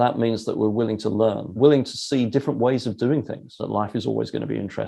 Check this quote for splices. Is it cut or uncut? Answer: cut